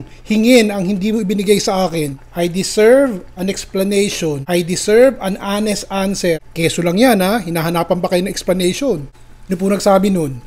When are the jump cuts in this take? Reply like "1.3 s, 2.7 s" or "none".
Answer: 2.2 s, 4.4 s, 6.5 s, 9.5 s

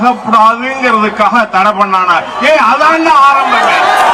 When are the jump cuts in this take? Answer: none

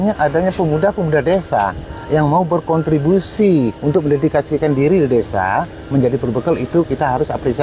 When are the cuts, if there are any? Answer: none

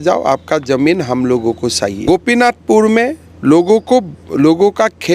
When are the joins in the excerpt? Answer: 2.0 s

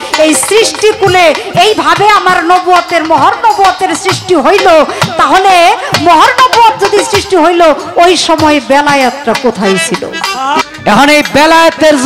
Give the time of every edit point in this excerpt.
10.6 s

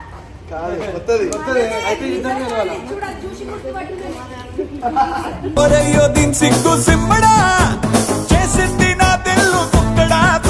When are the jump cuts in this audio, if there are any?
none

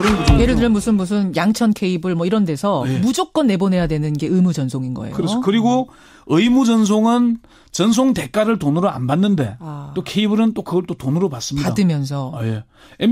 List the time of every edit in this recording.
5.8 s

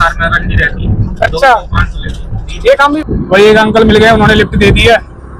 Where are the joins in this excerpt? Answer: 3.0 s

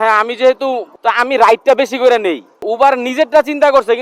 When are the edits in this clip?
0.9 s, 2.5 s

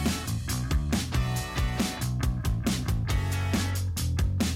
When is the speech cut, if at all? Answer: 2.3 s

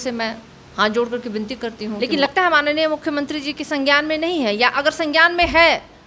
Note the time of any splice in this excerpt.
1.9 s

